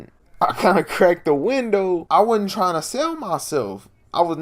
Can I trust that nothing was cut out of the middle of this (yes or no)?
no